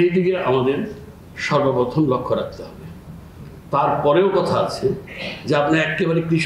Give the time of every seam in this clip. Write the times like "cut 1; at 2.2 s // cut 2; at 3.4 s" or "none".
none